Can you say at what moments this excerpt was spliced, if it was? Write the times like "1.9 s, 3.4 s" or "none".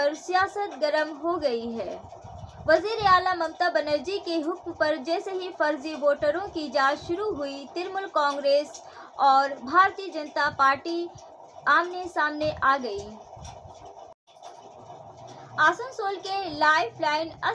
14.3 s